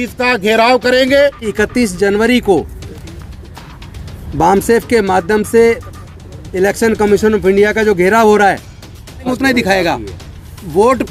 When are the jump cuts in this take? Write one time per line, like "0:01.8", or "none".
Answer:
0:01.5
0:09.3